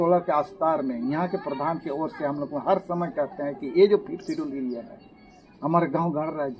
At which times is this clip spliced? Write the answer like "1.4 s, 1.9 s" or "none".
none